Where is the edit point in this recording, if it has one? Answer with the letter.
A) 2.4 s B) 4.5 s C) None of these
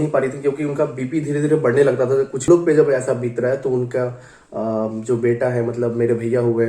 A